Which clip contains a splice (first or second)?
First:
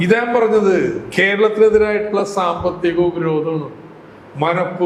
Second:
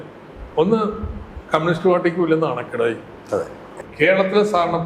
second